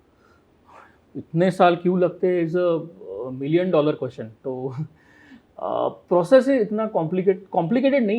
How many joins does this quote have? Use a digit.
0